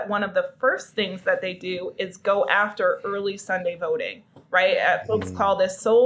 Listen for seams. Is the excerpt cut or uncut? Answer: uncut